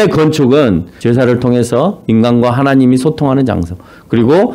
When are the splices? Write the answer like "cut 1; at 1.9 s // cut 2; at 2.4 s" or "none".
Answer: cut 1; at 0.9 s